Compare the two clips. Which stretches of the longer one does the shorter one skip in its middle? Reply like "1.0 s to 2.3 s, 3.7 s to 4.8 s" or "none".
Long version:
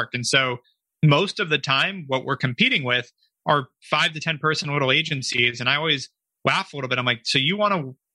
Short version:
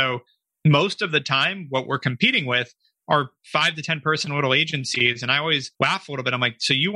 6.1 s to 6.3 s